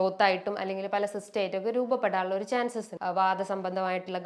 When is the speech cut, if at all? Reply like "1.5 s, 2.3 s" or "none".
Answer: 2.9 s